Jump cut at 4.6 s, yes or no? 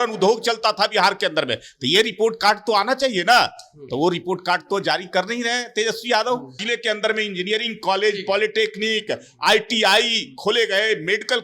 no